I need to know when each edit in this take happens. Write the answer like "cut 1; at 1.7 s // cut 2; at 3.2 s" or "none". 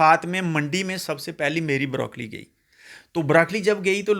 none